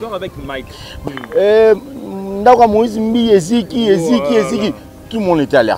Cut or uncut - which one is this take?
cut